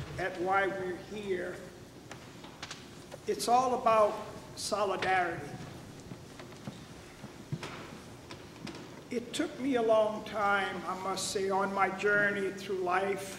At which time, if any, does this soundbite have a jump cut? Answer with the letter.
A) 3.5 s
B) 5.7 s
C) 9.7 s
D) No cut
C